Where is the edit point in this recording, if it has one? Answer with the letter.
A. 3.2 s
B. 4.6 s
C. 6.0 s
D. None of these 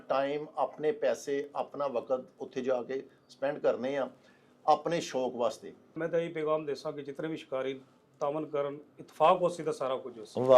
C